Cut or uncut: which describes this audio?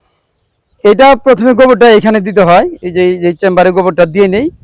uncut